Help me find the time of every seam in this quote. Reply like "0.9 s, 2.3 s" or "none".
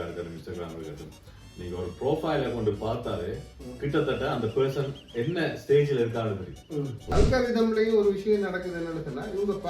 7.0 s